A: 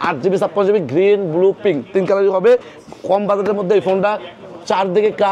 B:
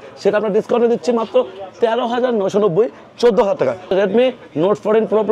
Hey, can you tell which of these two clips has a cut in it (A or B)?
B